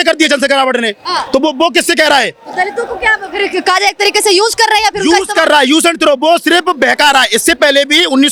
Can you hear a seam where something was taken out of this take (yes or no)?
no